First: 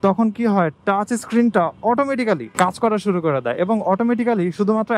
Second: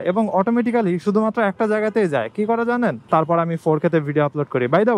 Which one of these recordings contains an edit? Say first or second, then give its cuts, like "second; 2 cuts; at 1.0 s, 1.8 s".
second; 1 cut; at 3.0 s